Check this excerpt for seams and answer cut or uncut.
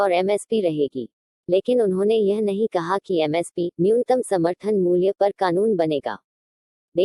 uncut